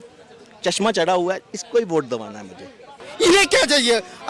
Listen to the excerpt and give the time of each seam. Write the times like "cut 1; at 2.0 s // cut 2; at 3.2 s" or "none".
cut 1; at 2.9 s